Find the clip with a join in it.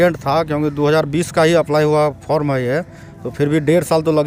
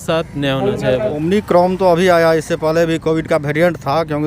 second; 1 cut; at 1.1 s

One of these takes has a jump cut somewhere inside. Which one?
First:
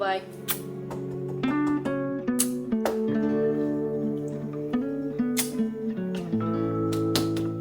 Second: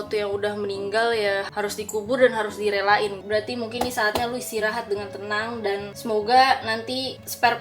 second; 2 cuts; at 1.5 s, 3.2 s

